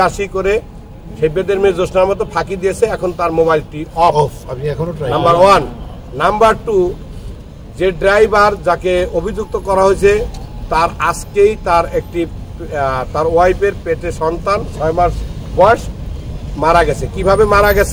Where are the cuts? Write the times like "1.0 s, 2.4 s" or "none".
none